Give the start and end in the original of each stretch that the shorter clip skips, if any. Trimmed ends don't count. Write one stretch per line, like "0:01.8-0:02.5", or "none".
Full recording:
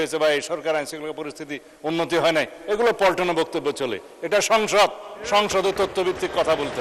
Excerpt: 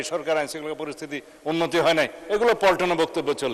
none